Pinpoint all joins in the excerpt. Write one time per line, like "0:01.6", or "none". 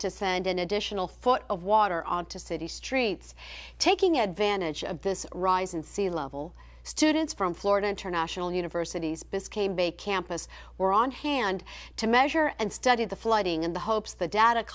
0:04.3